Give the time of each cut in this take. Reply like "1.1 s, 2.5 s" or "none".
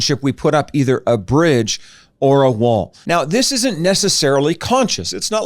2.9 s

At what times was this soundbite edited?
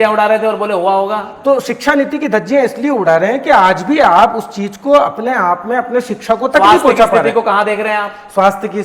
none

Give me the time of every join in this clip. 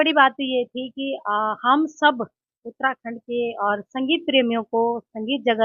none

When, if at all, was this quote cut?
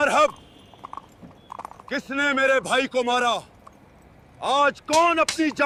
none

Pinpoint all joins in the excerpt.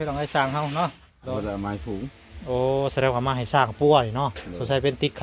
1.3 s

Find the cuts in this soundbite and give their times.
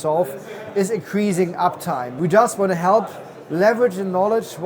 2.1 s

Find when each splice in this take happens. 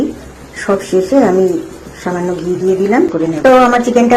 3.2 s

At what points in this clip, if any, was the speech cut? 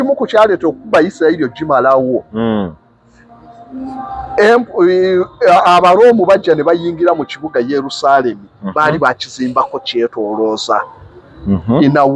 none

